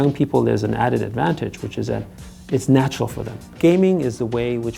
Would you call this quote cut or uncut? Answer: cut